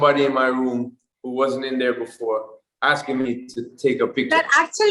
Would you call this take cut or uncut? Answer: uncut